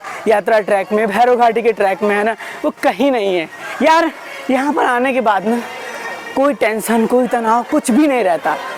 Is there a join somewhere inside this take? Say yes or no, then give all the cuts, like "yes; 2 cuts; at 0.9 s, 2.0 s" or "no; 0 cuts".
no; 0 cuts